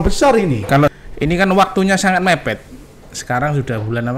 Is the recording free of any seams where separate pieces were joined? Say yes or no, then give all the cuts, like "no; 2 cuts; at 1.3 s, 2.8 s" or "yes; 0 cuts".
no; 1 cut; at 0.9 s